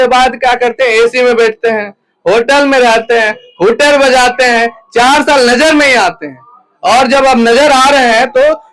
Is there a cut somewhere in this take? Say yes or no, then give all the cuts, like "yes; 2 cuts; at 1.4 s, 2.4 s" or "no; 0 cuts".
no; 0 cuts